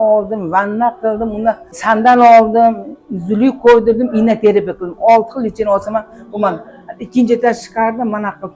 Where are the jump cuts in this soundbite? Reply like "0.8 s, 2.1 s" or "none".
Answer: 1.7 s